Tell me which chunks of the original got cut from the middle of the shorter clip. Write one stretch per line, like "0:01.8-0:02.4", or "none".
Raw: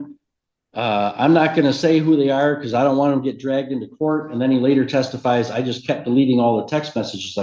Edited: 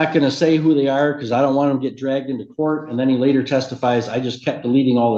none